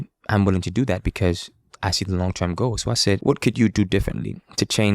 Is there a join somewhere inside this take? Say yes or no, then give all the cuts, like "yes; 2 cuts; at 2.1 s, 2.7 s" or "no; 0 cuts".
yes; 1 cut; at 3.2 s